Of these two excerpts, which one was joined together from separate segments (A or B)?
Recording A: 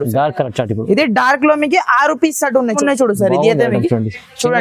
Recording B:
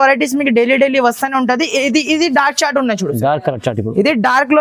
A